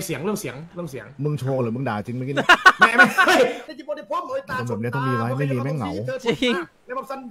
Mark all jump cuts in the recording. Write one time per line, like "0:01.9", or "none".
0:03.6